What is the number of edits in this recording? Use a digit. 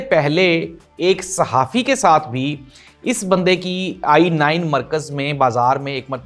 0